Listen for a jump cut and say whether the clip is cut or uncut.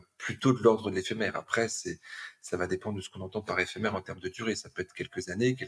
uncut